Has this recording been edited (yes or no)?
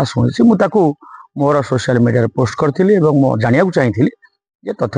no